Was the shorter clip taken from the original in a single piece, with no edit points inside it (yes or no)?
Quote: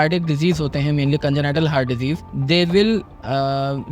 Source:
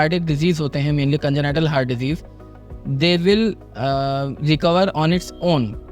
no